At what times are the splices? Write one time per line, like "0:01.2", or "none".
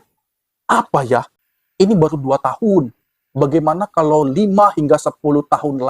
0:01.4

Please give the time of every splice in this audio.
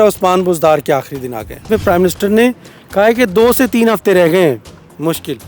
0:01.7

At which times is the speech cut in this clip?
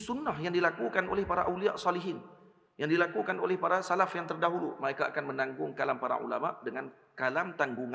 none

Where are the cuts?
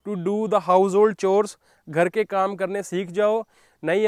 none

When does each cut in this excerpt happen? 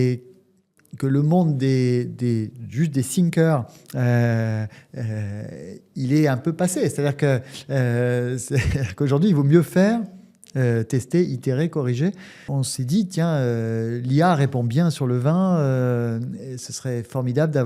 0:12.5

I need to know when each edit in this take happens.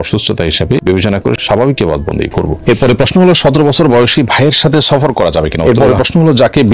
0:02.5
0:05.6

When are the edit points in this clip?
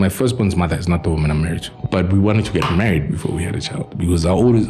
0:01.7

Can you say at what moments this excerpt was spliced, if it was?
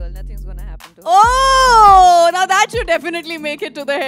0:01.1

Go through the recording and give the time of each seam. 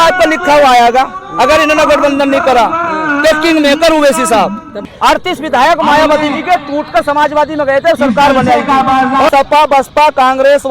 0:04.7
0:09.3

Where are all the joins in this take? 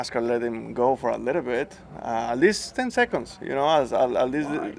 none

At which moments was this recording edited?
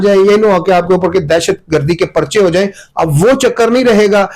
none

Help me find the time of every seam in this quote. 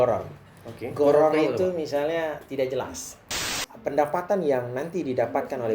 0:03.3

